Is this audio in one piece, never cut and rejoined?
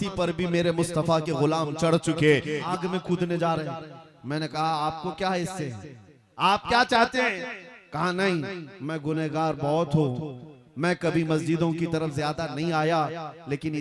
no; 1 cut; at 2.6 s

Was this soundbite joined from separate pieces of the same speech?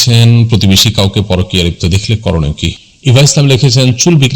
yes; 1 cut; at 2.8 s

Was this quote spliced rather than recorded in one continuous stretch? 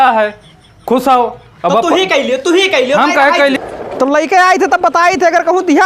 yes; 1 cut; at 3.6 s

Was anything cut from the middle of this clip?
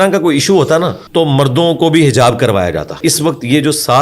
yes; 2 cuts; at 1.0 s, 3.0 s

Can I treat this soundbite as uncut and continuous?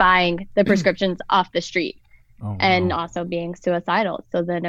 yes; 0 cuts

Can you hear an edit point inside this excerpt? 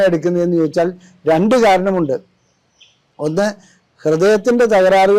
no; 0 cuts

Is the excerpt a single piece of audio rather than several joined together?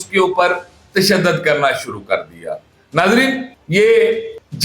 yes; 0 cuts

